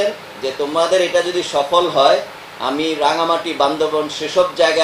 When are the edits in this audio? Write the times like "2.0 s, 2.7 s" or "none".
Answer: none